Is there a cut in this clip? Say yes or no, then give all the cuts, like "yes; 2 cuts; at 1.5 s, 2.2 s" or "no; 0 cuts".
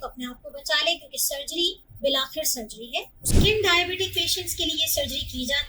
yes; 1 cut; at 3.3 s